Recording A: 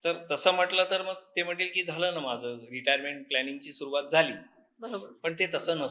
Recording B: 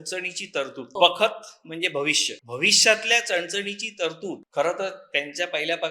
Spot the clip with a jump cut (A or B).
B